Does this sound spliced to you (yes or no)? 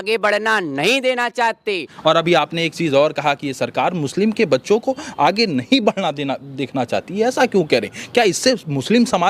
yes